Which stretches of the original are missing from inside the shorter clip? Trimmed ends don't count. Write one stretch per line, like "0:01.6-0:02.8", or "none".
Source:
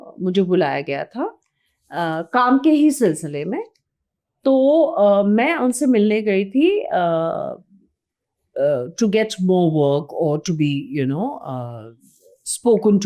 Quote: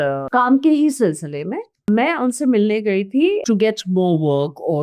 0:03.9-0:05.3
0:06.8-0:08.9